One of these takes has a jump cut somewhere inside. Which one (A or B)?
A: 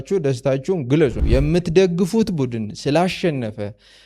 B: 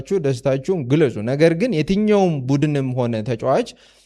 A